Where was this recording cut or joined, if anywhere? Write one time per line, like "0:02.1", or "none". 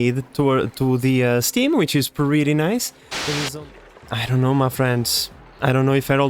0:03.5